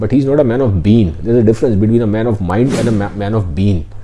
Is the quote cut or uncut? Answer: uncut